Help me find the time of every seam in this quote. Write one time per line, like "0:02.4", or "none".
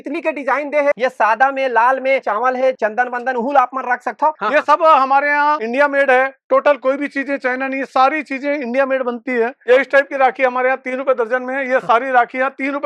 0:00.9
0:04.4
0:09.7